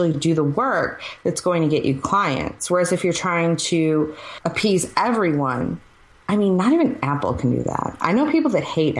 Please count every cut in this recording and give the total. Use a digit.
1